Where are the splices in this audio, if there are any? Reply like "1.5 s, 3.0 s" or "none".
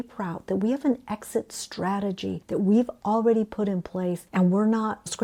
none

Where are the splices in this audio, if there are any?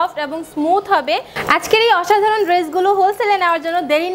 1.3 s

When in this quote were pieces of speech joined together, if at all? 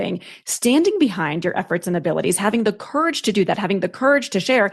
none

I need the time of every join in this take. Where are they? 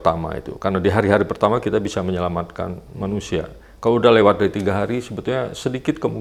none

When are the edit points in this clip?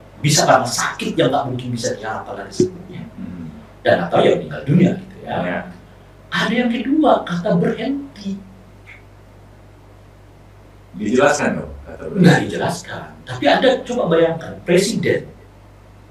none

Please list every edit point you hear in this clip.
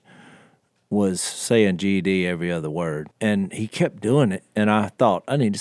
3.0 s

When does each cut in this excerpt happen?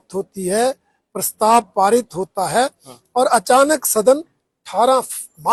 none

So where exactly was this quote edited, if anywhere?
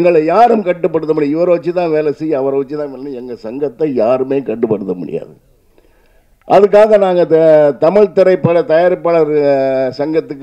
none

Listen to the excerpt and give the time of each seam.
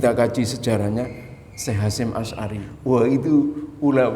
2.7 s

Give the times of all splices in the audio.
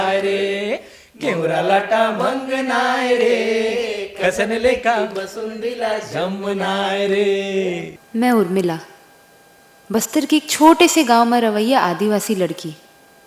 7.9 s

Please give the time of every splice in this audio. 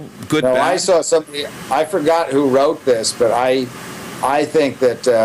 none

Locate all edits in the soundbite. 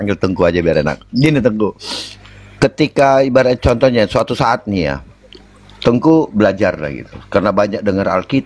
none

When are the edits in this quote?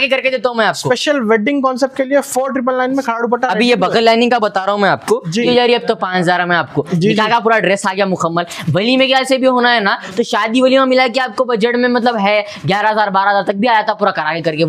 5.5 s

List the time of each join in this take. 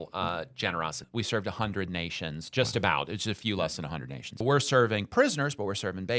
1.0 s, 4.4 s

